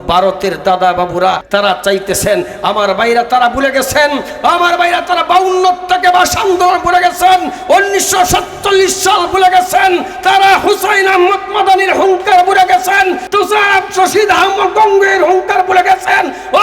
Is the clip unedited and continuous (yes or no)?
no